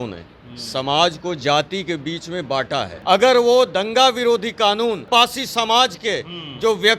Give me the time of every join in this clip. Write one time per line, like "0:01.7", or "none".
0:02.9
0:05.1